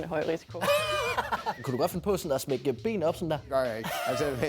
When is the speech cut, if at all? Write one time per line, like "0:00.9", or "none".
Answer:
0:01.6